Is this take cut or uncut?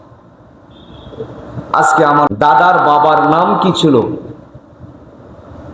cut